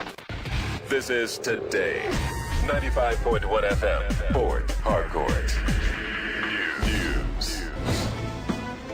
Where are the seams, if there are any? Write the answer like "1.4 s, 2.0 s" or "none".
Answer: none